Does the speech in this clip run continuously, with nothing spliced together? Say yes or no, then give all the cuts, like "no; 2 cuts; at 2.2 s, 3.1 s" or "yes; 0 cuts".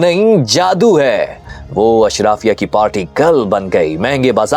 no; 1 cut; at 1.4 s